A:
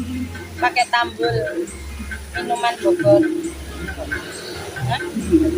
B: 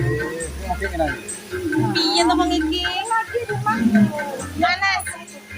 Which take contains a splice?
B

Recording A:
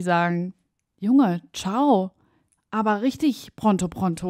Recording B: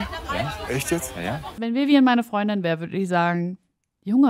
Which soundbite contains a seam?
B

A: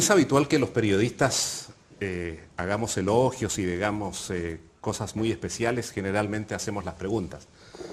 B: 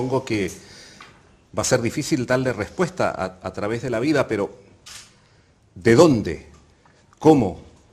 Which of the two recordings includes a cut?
B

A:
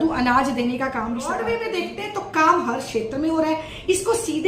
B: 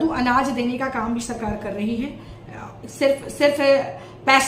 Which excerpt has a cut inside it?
A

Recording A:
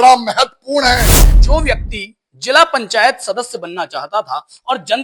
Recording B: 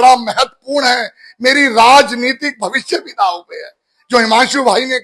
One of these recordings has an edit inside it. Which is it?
A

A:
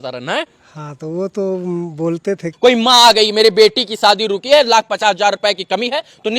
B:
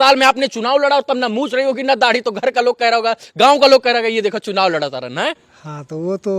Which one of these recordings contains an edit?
A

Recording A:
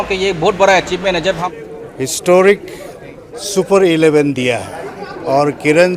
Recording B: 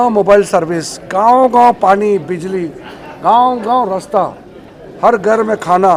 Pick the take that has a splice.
A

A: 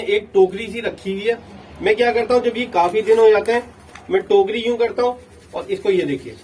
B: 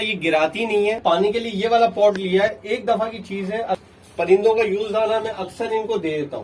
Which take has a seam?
B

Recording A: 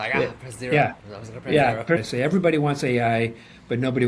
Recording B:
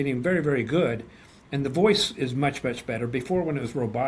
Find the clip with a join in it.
A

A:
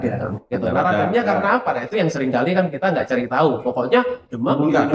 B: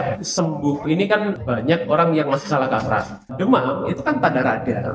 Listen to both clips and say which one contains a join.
B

